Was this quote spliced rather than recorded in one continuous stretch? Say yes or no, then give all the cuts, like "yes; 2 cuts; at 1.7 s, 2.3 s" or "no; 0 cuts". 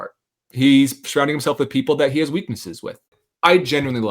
yes; 1 cut; at 3.2 s